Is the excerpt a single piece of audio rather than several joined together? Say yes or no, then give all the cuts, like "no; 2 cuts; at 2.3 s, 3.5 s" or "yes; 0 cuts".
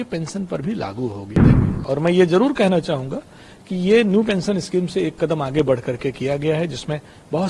no; 1 cut; at 1.5 s